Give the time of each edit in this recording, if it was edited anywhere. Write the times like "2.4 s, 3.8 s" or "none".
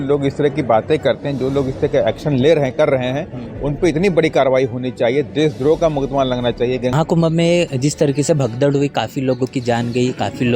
6.9 s

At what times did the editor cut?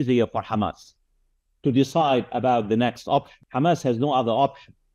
3.4 s

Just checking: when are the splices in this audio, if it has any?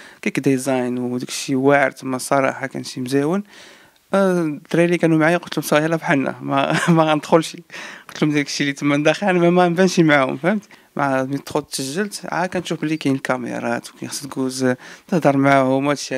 none

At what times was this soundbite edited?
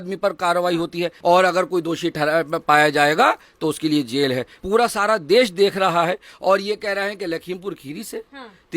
1.1 s, 4.5 s

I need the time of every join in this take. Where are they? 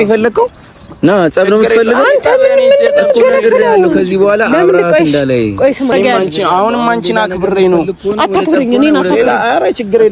5.9 s

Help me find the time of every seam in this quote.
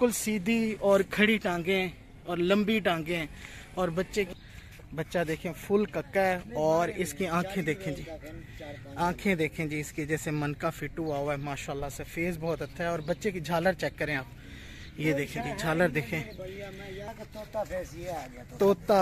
4.3 s, 17.1 s

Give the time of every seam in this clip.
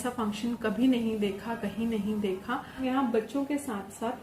2.8 s

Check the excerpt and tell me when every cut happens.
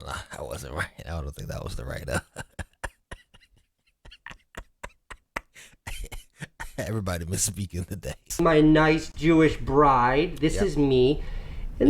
8.3 s

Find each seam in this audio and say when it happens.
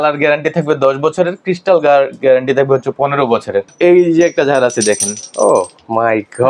3.7 s

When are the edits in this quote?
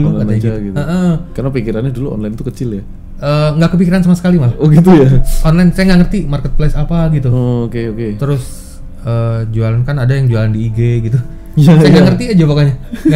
none

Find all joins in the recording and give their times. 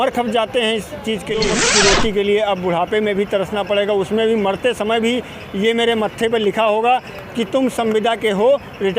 1.6 s

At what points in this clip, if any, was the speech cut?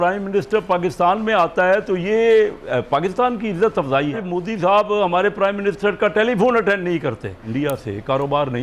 4.2 s, 7.4 s

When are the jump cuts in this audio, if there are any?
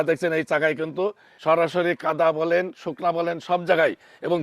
1.3 s

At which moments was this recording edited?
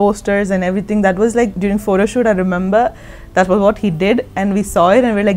1.5 s

